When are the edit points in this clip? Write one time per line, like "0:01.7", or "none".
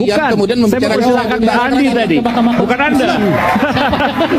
none